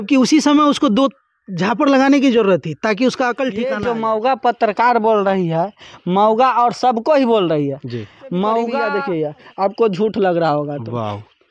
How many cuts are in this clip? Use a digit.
2